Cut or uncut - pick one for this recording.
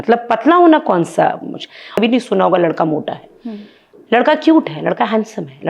cut